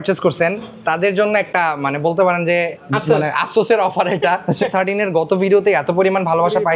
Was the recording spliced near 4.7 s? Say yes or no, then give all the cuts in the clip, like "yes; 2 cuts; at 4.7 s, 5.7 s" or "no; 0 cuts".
yes; 2 cuts; at 2.8 s, 4.7 s